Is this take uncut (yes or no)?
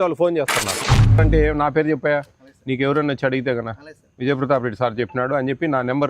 no